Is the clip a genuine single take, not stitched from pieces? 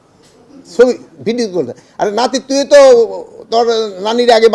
yes; 0 cuts

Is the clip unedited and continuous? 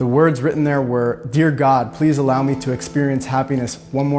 yes; 0 cuts

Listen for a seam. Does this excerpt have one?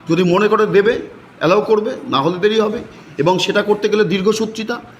no; 0 cuts

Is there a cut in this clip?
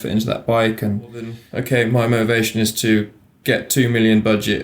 yes; 1 cut; at 1.5 s

